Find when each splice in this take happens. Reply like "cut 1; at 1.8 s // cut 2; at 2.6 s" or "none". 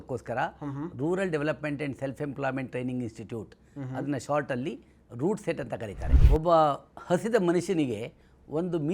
cut 1; at 6.0 s